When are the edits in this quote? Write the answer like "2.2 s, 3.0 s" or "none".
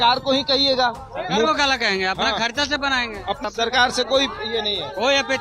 3.4 s